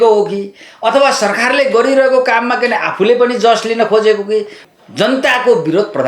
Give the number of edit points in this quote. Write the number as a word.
one